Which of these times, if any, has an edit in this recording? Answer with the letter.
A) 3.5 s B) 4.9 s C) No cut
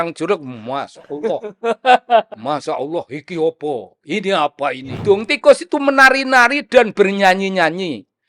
B